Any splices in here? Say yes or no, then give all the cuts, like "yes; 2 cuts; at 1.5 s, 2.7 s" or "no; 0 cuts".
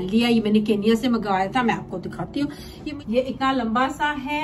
yes; 1 cut; at 2.7 s